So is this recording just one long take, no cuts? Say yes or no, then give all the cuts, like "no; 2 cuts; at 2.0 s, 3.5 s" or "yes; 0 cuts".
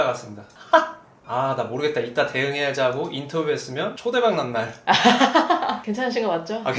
no; 2 cuts; at 1.2 s, 5.8 s